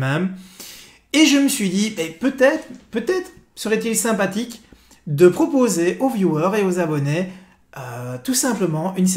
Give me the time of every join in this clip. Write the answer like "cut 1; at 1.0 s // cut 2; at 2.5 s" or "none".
cut 1; at 3.4 s